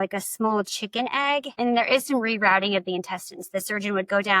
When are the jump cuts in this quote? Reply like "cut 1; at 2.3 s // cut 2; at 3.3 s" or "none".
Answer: cut 1; at 1.5 s